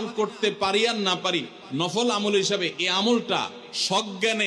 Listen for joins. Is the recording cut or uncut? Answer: uncut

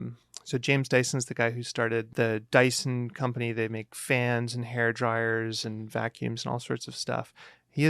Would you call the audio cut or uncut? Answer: cut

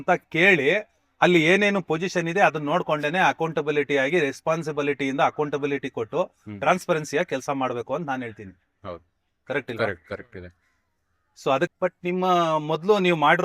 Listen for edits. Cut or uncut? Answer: cut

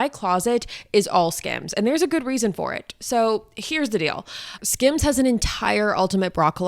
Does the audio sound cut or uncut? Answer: cut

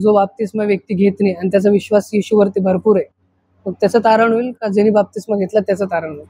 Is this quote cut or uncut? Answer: uncut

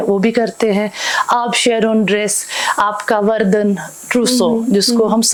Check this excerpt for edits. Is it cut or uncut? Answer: uncut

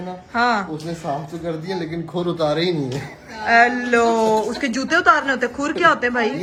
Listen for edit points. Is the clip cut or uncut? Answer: uncut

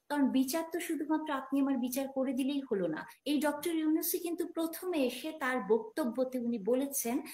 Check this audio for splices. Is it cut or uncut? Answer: cut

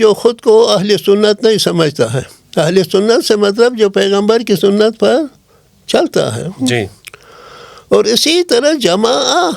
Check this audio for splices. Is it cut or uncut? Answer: uncut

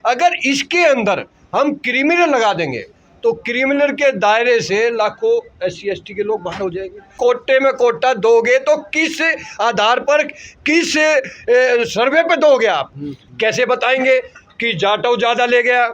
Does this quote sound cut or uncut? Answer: cut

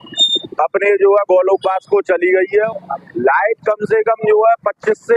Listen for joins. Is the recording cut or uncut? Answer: cut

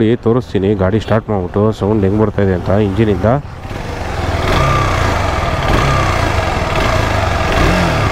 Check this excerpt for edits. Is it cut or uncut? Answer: uncut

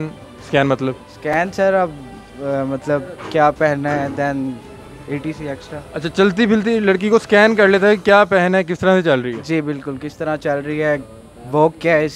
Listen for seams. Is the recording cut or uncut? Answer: uncut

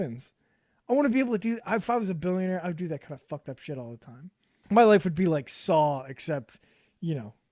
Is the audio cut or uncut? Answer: cut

